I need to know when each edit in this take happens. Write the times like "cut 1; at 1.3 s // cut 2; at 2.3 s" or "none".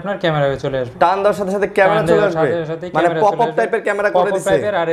none